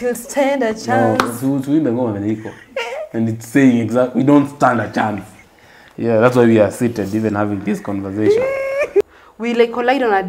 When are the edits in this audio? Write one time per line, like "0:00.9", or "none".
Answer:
0:09.0